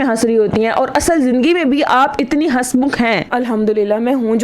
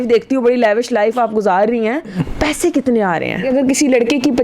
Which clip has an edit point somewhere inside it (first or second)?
second